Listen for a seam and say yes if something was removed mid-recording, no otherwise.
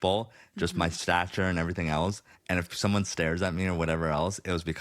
yes